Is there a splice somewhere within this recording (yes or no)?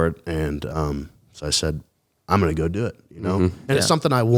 no